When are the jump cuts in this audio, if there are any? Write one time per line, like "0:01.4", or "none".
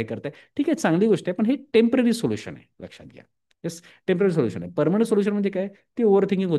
none